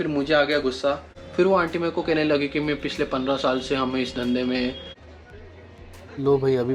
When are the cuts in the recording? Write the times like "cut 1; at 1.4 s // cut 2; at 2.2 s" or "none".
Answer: cut 1; at 1.1 s // cut 2; at 4.9 s